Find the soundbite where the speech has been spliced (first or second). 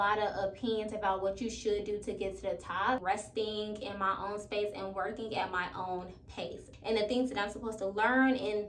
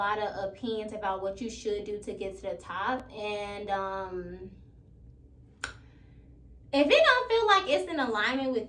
first